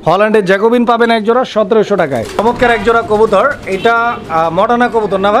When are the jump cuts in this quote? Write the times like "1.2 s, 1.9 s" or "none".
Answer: 2.4 s